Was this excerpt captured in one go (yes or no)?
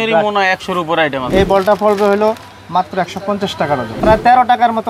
no